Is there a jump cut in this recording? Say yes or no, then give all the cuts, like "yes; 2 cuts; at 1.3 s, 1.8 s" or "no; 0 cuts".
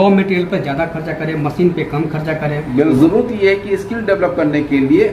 yes; 1 cut; at 2.9 s